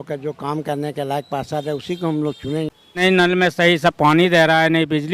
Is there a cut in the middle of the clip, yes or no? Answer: yes